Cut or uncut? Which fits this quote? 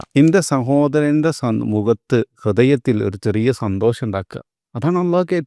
uncut